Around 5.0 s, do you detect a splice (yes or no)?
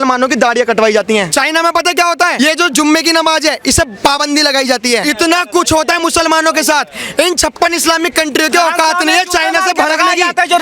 yes